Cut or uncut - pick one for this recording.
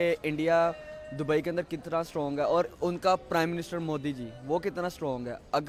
uncut